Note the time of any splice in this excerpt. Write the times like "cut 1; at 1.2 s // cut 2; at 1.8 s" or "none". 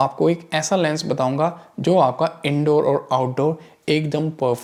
none

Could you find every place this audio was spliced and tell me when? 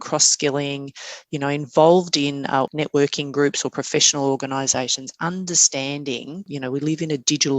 cut 1; at 2.7 s // cut 2; at 6.5 s

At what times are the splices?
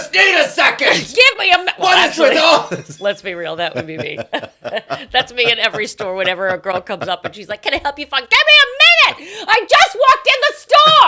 none

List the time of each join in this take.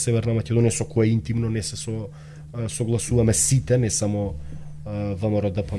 none

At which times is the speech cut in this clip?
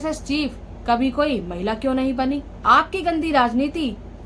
cut 1; at 2.5 s

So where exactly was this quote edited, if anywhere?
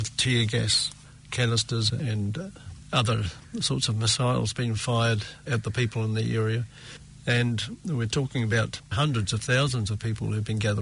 cut 1; at 2.0 s // cut 2; at 8.9 s

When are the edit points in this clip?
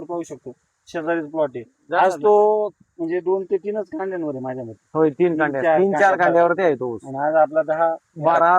cut 1; at 4.8 s

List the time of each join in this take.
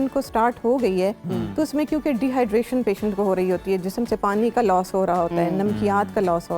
none

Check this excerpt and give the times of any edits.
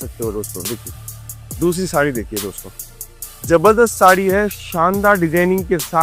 none

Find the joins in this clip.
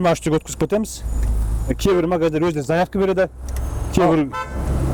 none

